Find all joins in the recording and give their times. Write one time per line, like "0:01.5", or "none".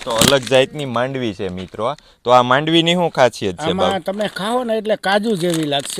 none